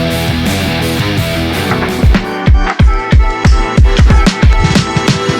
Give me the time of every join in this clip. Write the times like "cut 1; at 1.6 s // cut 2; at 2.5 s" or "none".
cut 1; at 1.7 s